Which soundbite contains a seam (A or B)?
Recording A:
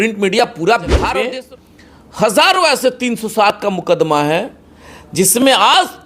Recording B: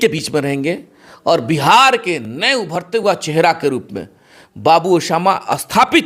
A